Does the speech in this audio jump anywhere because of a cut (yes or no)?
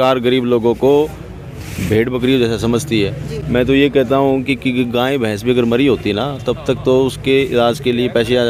no